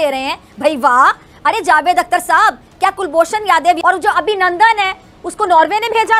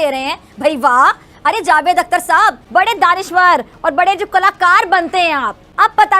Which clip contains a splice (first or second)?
second